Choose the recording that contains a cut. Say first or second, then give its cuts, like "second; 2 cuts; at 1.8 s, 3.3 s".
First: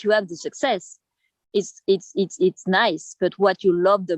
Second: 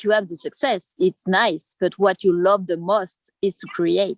second; 1 cut; at 0.9 s